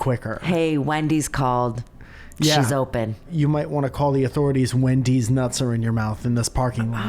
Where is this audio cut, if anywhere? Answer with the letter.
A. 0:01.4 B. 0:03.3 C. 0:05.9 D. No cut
B